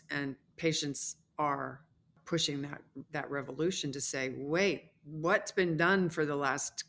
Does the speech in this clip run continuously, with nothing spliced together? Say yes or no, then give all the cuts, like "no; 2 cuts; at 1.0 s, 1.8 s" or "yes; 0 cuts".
yes; 0 cuts